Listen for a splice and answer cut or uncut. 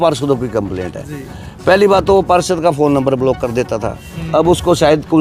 uncut